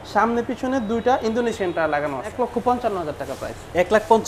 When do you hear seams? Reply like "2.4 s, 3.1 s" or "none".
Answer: 2.3 s